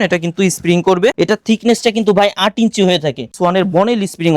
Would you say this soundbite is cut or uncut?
cut